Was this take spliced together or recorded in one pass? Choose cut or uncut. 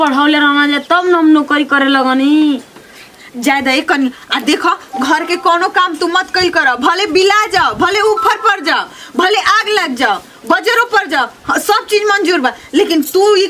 uncut